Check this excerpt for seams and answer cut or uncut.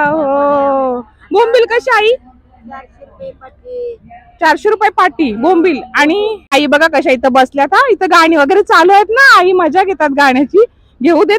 cut